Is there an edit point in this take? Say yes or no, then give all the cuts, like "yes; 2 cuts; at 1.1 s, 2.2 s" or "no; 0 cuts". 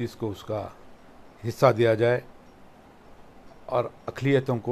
no; 0 cuts